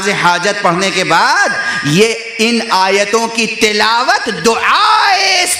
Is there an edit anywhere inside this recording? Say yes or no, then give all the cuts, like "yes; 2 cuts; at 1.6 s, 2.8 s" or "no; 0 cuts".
no; 0 cuts